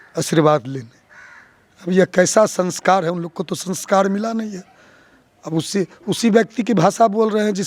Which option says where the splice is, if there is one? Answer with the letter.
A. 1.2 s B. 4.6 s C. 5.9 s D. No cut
D